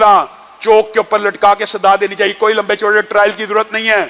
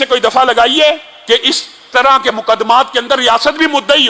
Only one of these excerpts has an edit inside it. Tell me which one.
second; 1 cut; at 1.1 s

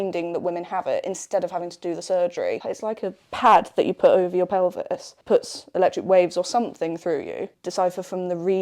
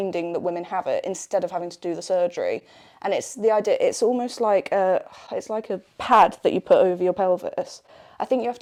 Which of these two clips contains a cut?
first; 3 cuts; at 2.7 s, 5.1 s, 7.6 s

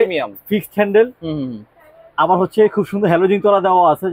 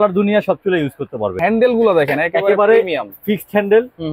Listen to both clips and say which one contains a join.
second; 1 cut; at 1.3 s

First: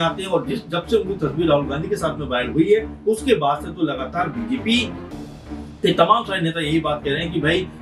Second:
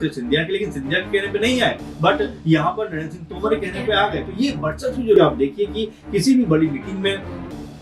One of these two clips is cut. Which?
second; 1 cut; at 5.2 s

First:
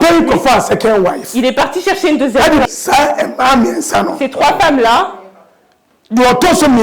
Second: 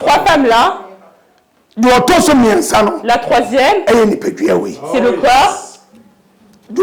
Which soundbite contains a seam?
first; 1 cut; at 2.6 s

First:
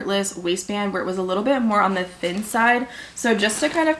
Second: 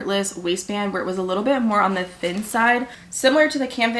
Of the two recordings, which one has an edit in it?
second; 1 cut; at 3.0 s

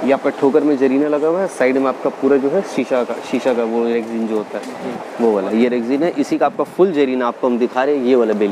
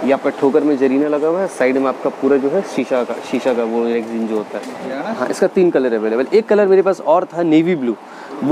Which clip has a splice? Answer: second; 1 cut; at 5.0 s

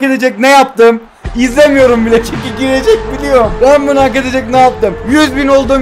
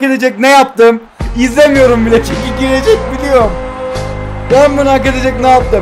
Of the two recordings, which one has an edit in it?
first; 2 cuts; at 3.5 s, 5.0 s

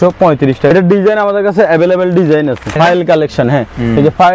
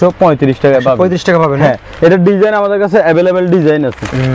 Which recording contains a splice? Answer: first; 2 cuts; at 0.7 s, 2.8 s

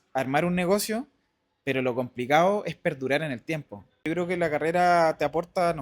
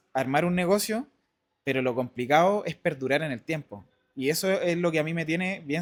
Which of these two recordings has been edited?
first; 1 cut; at 4.0 s

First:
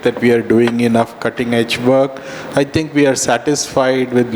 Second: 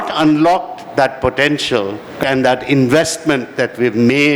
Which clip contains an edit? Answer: second; 1 cut; at 2.2 s

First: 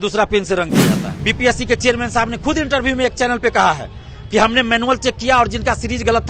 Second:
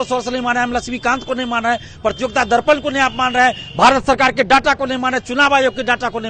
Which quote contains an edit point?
first; 1 cut; at 1.1 s

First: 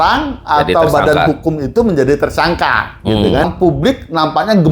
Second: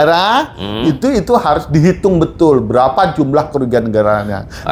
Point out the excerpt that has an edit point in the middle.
first; 1 cut; at 3.5 s

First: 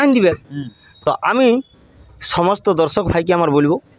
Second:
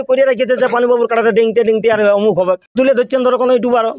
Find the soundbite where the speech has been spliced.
second; 1 cut; at 2.7 s

